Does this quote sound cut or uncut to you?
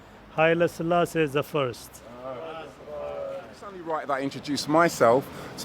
cut